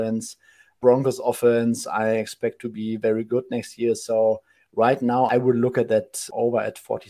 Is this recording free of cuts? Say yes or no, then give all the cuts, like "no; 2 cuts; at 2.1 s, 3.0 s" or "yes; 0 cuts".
no; 3 cuts; at 0.8 s, 5.3 s, 6.3 s